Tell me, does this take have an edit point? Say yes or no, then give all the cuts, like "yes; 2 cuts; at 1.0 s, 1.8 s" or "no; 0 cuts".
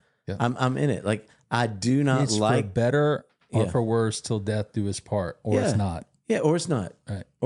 no; 0 cuts